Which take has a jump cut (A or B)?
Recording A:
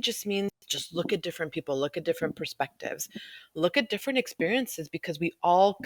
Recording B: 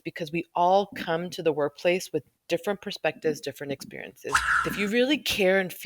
B